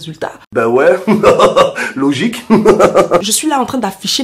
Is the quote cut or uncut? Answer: cut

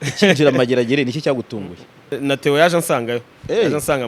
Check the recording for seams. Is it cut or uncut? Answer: cut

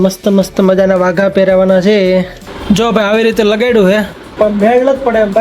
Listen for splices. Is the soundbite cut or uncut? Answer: cut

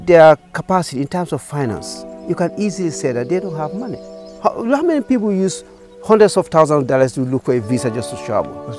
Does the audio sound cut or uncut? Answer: cut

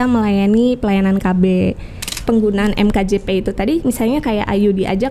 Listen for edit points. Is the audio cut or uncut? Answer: cut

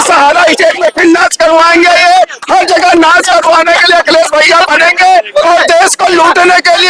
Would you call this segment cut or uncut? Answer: uncut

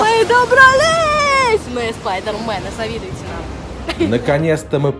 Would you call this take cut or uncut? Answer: cut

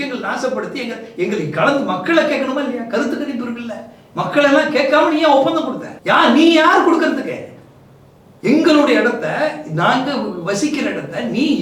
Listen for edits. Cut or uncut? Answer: uncut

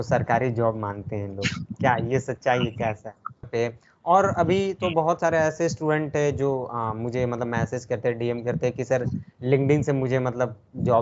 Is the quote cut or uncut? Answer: cut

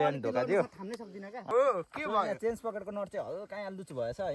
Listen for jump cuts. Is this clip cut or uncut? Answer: cut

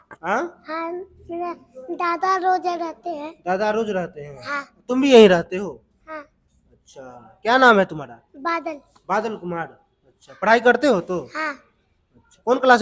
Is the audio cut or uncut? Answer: uncut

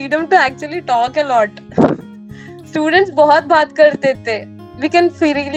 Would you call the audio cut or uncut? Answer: uncut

